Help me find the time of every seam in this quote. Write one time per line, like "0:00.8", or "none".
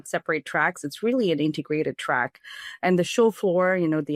none